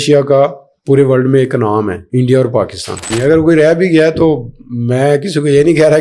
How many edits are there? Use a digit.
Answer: 2